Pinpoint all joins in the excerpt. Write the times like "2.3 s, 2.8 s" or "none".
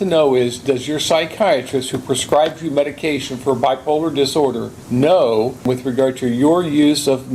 4.7 s, 5.6 s